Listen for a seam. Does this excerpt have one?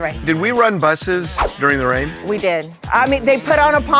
yes; 2 cuts; at 1.4 s, 2.8 s

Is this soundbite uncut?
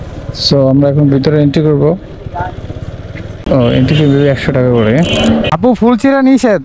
no; 2 cuts; at 3.4 s, 5.5 s

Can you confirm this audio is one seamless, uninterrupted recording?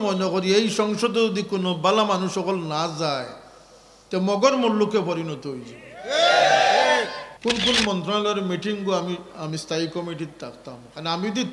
no; 1 cut; at 7.2 s

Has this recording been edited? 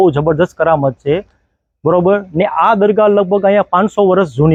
no; 0 cuts

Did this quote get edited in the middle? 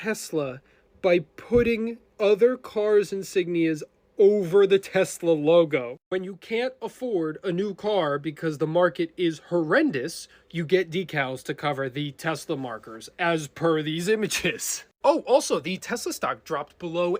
no; 0 cuts

